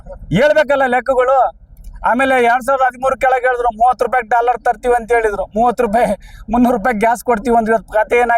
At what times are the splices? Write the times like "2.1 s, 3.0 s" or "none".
none